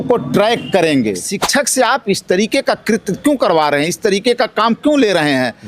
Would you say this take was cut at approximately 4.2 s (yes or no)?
no